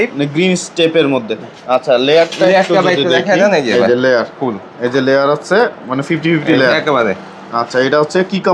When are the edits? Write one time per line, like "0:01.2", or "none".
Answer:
none